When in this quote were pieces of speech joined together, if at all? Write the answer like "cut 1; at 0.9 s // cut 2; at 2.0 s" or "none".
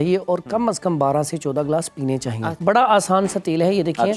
cut 1; at 2.4 s